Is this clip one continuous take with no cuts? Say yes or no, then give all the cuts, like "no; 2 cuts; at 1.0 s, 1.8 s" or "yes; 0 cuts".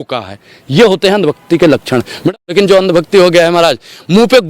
no; 1 cut; at 2.2 s